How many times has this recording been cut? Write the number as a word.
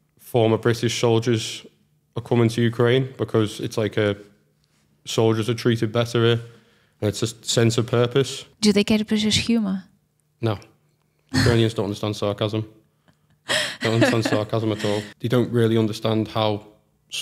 two